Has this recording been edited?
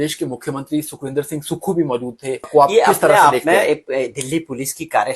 yes; 1 cut; at 2.5 s

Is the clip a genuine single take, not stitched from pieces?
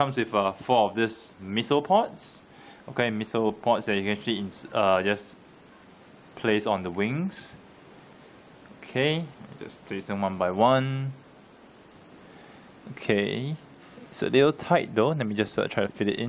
yes; 0 cuts

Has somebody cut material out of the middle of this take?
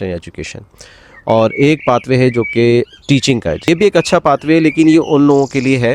yes; 1 cut; at 3.7 s

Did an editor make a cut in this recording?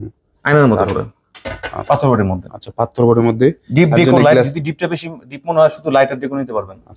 yes; 1 cut; at 1.7 s

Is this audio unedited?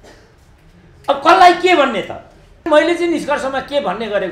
no; 1 cut; at 2.7 s

